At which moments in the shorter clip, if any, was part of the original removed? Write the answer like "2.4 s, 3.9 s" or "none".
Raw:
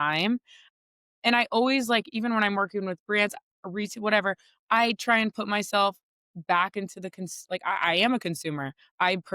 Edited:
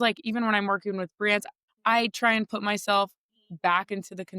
1.6 s